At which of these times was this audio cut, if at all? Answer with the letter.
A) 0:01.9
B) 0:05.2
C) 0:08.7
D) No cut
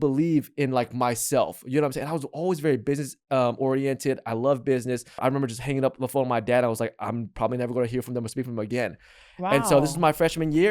B